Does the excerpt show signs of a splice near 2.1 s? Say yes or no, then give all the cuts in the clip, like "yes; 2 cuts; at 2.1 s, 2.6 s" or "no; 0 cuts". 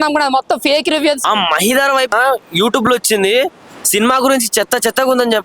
yes; 2 cuts; at 1.2 s, 2.1 s